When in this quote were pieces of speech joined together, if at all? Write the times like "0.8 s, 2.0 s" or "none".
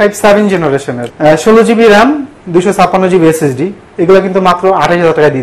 1.0 s

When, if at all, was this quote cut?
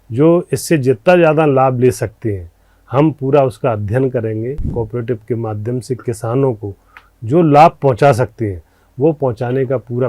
4.6 s

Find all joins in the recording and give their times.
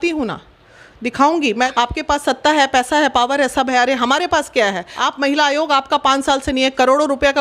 1.7 s, 4.9 s

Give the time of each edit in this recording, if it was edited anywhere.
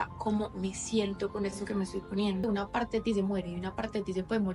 2.4 s

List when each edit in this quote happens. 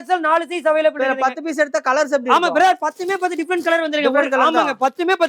none

